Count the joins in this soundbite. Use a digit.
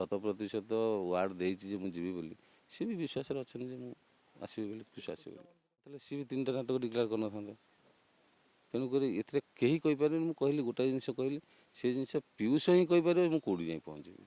1